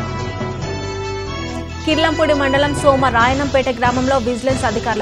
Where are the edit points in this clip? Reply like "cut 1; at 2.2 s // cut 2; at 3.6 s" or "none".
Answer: cut 1; at 1.0 s